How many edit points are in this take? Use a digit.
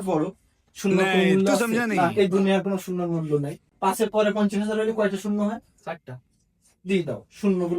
1